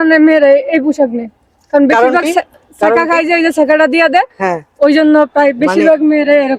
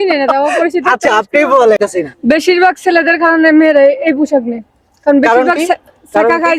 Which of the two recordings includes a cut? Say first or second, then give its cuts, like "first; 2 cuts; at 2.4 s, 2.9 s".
second; 1 cut; at 1.9 s